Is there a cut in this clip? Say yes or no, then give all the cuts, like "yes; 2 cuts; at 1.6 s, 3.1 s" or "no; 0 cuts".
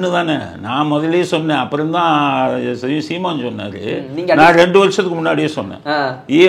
no; 0 cuts